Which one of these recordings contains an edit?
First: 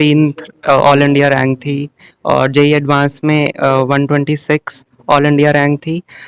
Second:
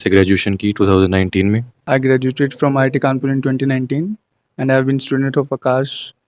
second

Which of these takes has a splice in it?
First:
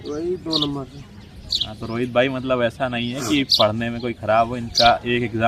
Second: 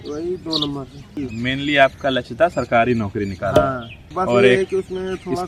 second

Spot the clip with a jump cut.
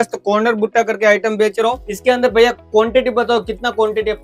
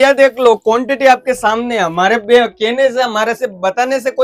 first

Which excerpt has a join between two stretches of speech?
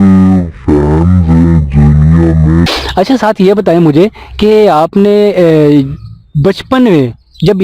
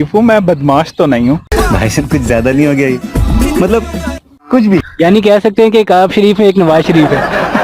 first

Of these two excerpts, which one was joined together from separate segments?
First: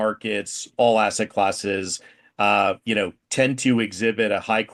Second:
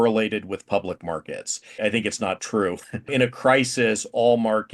second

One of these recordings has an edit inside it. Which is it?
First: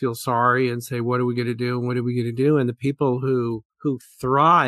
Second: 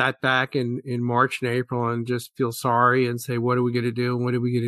first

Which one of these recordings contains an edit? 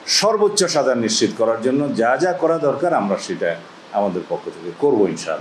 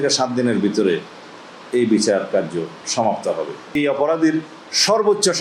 second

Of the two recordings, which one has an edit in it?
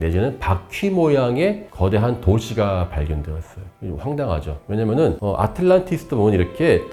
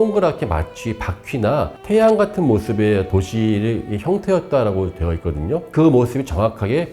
second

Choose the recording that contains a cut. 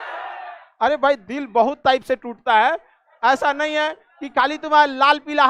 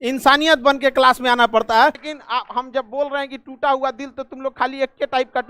second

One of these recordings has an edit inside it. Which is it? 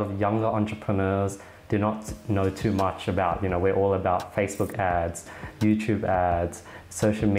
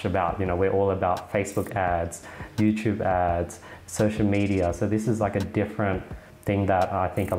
second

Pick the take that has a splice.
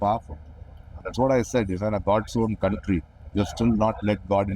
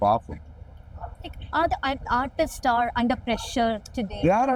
first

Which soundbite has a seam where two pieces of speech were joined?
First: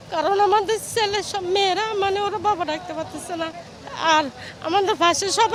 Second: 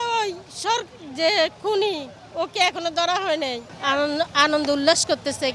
second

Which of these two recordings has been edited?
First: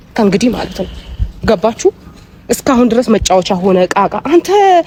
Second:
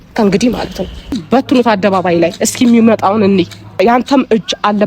second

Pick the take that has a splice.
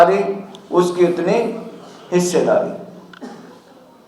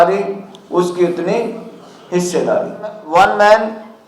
second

